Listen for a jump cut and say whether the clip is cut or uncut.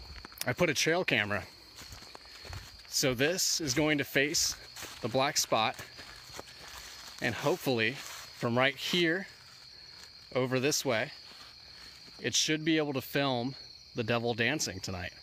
uncut